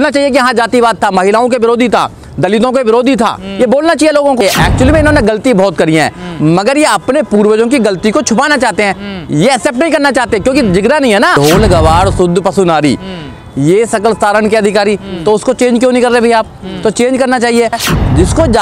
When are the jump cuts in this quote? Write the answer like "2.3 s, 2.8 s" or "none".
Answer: 4.4 s, 11.3 s, 17.8 s